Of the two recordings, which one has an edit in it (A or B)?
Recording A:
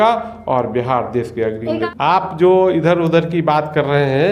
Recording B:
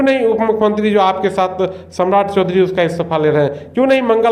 A